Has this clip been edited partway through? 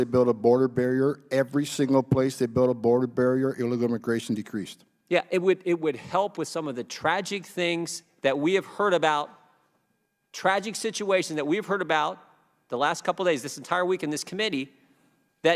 no; 0 cuts

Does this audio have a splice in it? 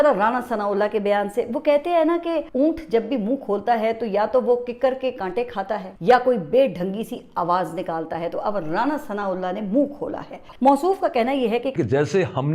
yes; 2 cuts; at 10.4 s, 11.7 s

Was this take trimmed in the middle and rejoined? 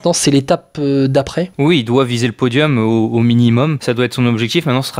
yes; 1 cut; at 3.8 s

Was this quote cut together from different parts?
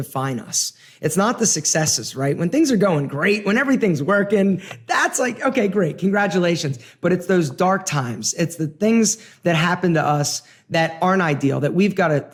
no; 0 cuts

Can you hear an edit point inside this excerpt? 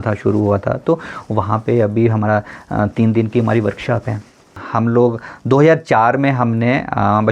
yes; 1 cut; at 4.6 s

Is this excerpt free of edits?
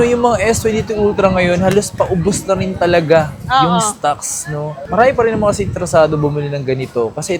yes; 0 cuts

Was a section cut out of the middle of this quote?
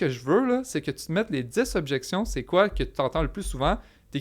no; 0 cuts

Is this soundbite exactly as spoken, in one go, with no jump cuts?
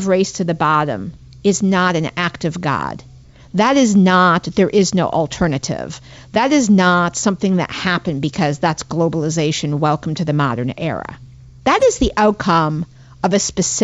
yes; 0 cuts

